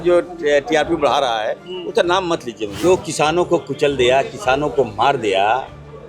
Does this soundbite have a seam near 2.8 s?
yes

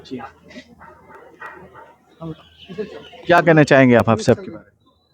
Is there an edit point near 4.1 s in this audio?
no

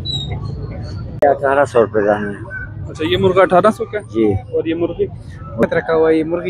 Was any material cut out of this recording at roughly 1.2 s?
yes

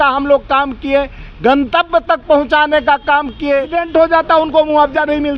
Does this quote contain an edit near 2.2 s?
no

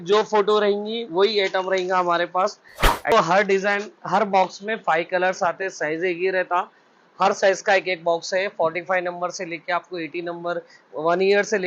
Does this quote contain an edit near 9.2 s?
no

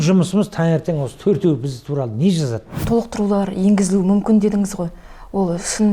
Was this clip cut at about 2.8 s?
yes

